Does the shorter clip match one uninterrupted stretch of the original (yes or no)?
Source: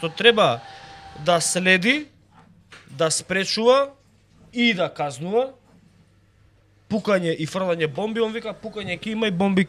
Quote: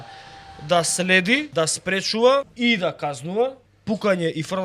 no